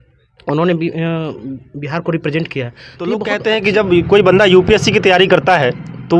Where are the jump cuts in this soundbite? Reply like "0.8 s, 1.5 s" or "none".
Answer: 3.2 s